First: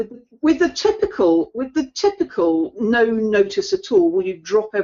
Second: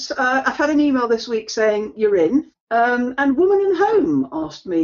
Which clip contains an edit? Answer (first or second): second